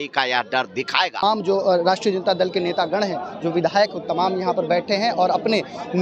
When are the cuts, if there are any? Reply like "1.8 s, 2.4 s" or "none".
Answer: 1.2 s